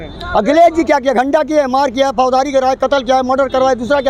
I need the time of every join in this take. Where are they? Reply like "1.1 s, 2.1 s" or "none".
none